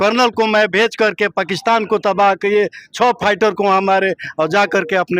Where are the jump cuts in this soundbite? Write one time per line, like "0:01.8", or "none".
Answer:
none

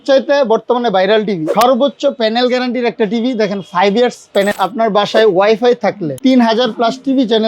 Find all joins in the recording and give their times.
0:01.5
0:04.5
0:06.1

